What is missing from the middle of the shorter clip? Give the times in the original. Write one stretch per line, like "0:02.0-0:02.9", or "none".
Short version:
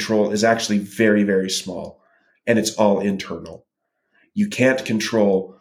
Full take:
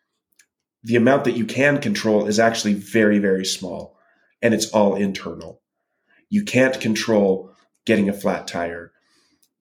none